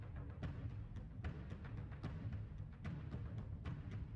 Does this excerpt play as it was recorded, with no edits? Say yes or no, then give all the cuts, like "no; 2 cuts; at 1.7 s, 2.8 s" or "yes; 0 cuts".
yes; 0 cuts